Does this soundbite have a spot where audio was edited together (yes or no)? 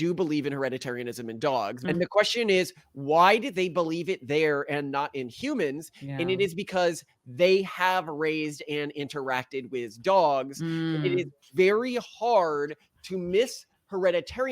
yes